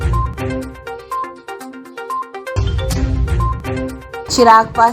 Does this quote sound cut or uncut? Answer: cut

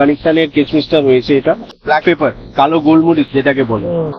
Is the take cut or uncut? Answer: cut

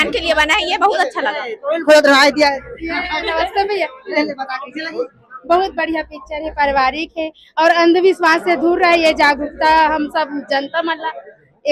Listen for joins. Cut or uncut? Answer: uncut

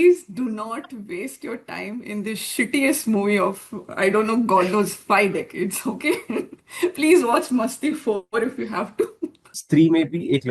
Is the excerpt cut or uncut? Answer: cut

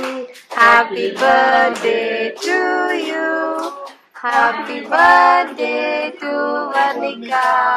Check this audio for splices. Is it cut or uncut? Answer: uncut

